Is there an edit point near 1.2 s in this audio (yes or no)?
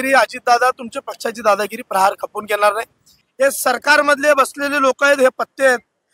no